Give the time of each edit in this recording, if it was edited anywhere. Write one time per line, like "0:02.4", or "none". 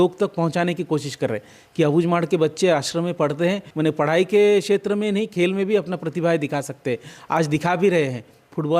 0:03.7